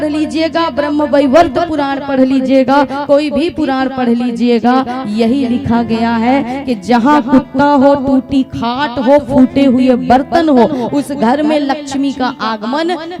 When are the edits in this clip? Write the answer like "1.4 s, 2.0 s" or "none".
none

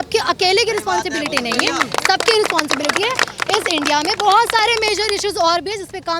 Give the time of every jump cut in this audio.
none

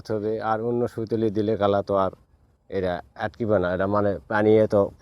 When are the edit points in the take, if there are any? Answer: none

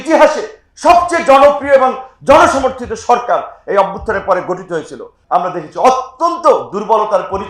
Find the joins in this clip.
5.2 s

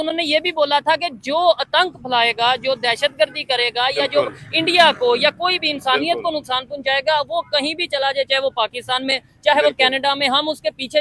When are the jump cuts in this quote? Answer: none

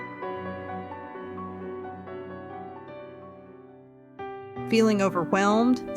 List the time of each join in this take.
2.8 s

